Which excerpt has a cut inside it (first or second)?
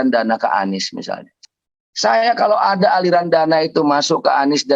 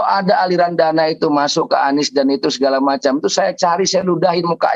first